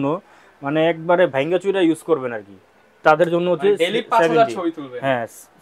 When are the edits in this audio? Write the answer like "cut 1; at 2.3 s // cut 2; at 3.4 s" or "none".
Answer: none